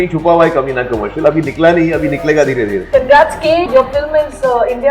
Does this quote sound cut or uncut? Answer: cut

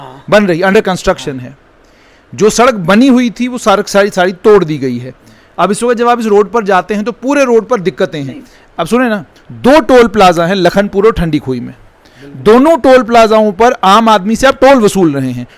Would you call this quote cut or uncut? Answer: uncut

